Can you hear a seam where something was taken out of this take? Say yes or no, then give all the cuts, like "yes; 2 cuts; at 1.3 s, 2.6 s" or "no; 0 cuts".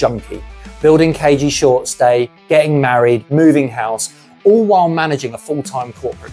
no; 0 cuts